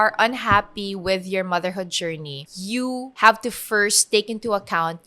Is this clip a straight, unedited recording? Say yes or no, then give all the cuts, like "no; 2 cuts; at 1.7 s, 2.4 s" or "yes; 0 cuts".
no; 1 cut; at 2.8 s